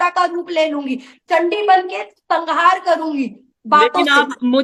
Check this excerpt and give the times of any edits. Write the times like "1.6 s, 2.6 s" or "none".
none